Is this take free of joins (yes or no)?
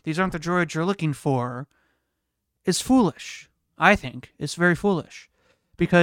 yes